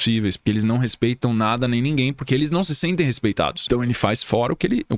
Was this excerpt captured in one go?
no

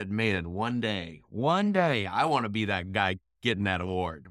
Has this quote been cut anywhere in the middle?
no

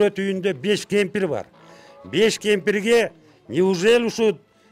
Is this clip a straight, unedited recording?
yes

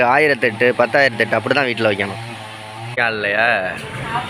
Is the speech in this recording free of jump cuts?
no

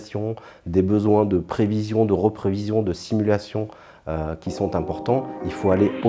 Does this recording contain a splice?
no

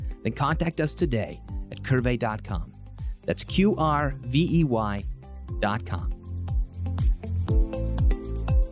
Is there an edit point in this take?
yes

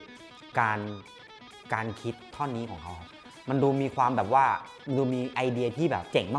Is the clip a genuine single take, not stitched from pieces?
yes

